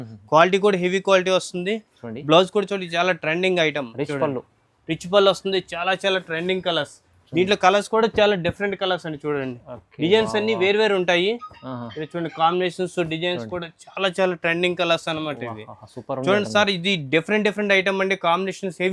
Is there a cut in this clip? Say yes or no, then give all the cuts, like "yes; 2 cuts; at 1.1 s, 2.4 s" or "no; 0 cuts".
no; 0 cuts